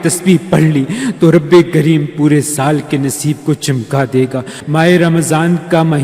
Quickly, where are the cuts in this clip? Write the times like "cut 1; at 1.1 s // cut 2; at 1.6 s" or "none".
cut 1; at 4.6 s